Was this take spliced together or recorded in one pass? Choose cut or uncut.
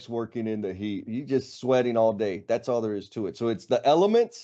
cut